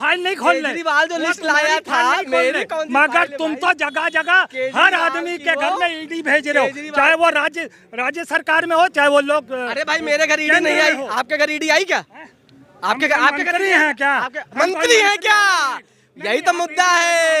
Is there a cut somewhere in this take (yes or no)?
no